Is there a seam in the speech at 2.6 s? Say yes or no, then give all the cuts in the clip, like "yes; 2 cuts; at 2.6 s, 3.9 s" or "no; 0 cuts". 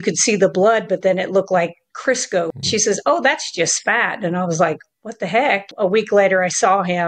yes; 2 cuts; at 2.6 s, 5.7 s